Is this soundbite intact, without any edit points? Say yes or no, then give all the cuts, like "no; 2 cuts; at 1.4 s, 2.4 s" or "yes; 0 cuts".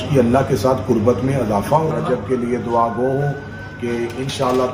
no; 1 cut; at 1.9 s